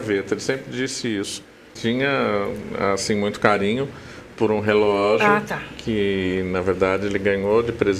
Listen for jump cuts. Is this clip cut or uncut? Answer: cut